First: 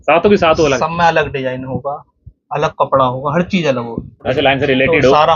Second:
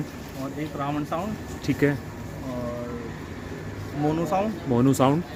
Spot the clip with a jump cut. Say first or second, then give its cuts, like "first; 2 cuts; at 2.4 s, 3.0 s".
first; 1 cut; at 4.3 s